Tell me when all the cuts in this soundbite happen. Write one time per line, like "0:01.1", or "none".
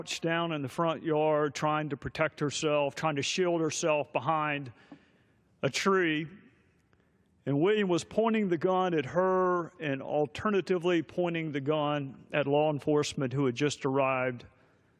0:07.6

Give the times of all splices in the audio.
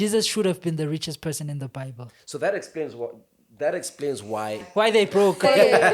0:04.7

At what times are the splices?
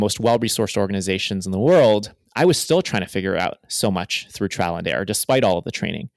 none

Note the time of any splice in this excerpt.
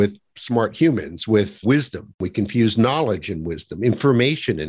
none

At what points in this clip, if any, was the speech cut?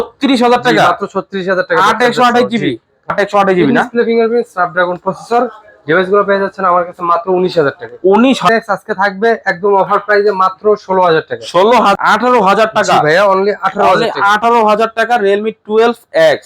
0:03.1
0:08.5
0:12.0

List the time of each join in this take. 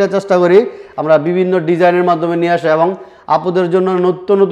none

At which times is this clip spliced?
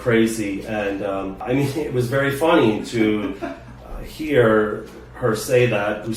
0:01.4

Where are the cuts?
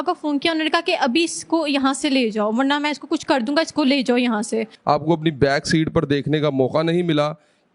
0:04.7

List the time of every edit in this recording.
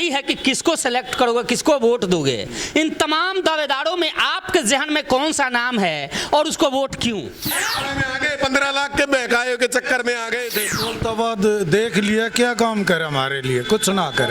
0:07.6
0:10.7

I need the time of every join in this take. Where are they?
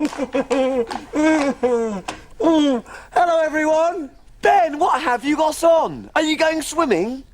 0:03.5

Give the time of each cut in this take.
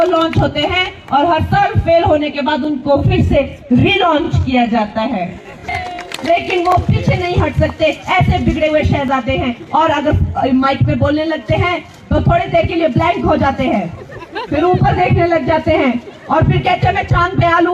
0:05.7

